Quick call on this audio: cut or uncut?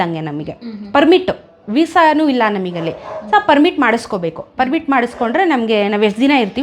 uncut